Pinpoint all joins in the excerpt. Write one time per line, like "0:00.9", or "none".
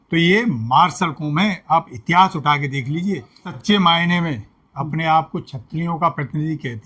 0:03.5